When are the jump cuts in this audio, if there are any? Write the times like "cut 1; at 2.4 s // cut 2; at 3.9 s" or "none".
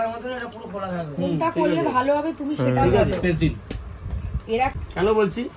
none